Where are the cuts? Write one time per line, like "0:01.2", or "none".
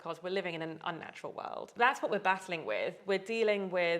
0:01.7